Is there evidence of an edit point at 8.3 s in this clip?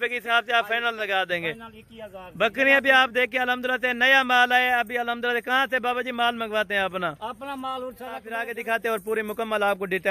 yes; 1 cut; at 8.3 s

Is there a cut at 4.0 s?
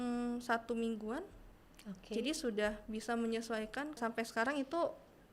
yes; 1 cut; at 4.0 s

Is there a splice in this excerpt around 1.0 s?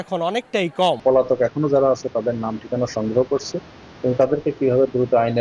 yes; 1 cut; at 1.0 s

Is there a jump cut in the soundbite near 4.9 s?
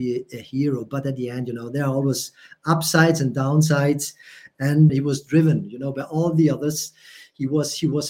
yes; 1 cut; at 4.9 s

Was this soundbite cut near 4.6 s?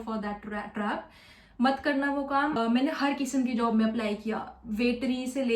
no; 1 cut; at 2.6 s

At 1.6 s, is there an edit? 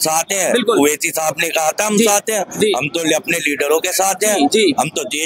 no; 0 cuts

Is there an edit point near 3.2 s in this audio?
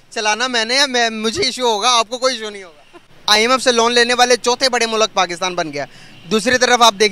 yes; 1 cut; at 3.2 s

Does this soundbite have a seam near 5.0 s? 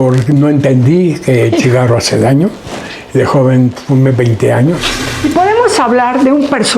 yes; 1 cut; at 5.0 s

